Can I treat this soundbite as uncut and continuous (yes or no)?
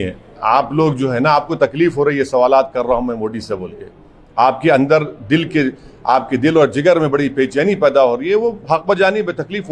yes